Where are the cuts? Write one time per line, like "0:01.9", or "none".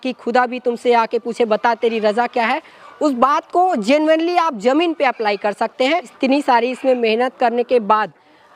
0:06.1